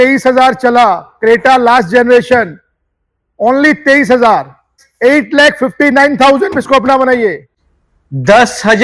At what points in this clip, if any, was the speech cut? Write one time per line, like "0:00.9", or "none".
0:04.8
0:07.7